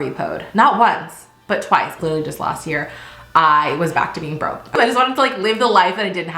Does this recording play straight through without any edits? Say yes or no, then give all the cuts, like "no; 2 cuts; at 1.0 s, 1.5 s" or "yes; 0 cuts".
no; 2 cuts; at 1.9 s, 4.8 s